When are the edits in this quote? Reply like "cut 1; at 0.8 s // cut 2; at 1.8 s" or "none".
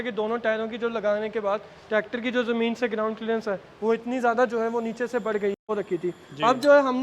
cut 1; at 5.6 s